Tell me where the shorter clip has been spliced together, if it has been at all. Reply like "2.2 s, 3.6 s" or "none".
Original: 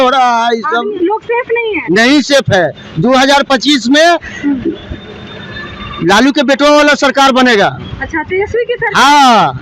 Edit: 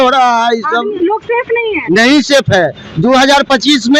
none